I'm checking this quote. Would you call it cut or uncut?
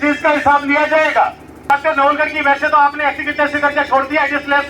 cut